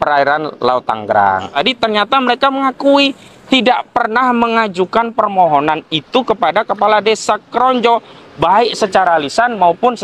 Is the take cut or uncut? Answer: cut